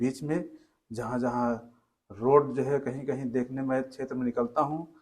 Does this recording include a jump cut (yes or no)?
no